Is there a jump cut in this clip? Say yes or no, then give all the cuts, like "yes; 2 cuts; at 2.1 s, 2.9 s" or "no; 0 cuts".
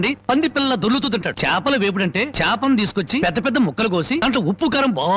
yes; 4 cuts; at 1.3 s, 2.3 s, 3.2 s, 4.2 s